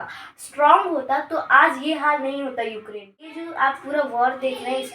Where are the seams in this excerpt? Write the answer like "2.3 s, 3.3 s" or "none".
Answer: 3.4 s